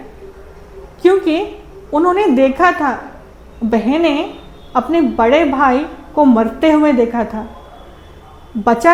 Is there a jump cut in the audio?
no; 0 cuts

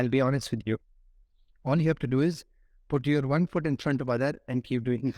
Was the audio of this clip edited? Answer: no; 0 cuts

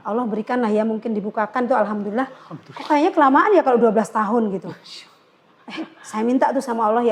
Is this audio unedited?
yes; 0 cuts

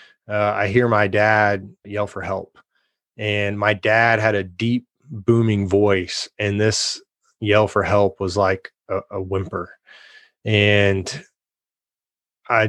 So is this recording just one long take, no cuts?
no; 1 cut; at 1.8 s

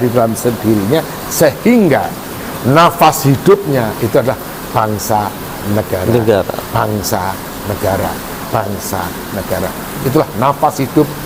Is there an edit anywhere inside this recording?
no; 0 cuts

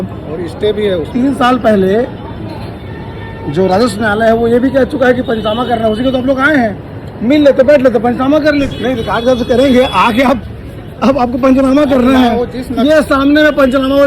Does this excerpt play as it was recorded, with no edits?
no; 1 cut; at 8.7 s

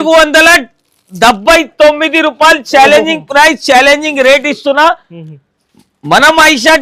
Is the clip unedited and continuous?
yes; 0 cuts

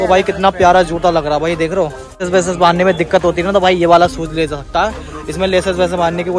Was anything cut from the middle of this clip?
yes; 1 cut; at 2.2 s

